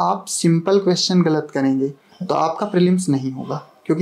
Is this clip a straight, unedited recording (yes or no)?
yes